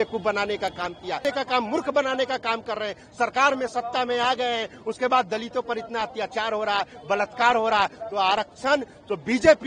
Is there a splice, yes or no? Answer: yes